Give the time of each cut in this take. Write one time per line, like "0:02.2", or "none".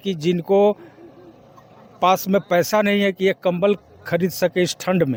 none